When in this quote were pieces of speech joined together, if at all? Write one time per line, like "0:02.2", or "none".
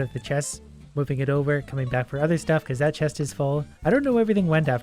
0:03.7